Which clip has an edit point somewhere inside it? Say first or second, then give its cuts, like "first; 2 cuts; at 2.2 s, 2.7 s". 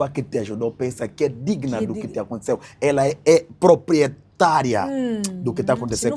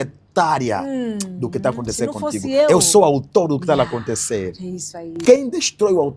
second; 1 cut; at 5.2 s